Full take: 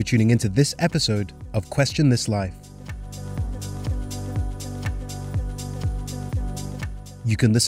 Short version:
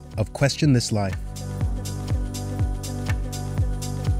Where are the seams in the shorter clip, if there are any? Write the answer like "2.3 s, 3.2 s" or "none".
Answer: 1.2 s